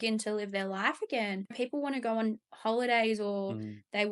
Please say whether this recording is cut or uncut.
cut